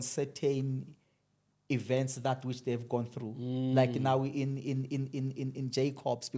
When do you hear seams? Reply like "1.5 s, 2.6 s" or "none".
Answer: none